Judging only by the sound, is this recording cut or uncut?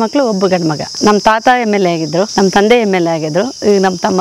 cut